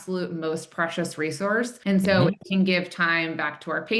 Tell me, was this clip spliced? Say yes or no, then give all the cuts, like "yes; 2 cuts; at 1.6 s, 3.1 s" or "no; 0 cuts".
yes; 2 cuts; at 1.8 s, 2.4 s